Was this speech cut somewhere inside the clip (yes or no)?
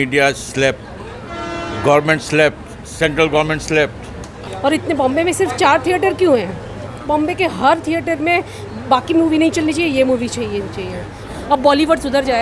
yes